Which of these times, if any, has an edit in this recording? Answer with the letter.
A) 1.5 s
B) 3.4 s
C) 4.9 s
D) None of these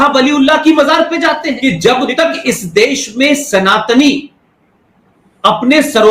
A